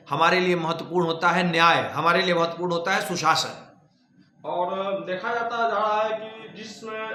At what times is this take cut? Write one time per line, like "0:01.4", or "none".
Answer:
none